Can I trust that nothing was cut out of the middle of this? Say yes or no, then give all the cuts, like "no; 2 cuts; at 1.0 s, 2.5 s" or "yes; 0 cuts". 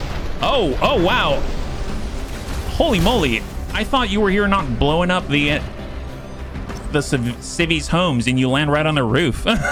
yes; 0 cuts